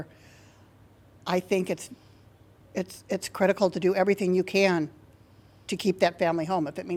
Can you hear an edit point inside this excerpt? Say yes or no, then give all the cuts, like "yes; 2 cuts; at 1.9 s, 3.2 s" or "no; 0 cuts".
no; 0 cuts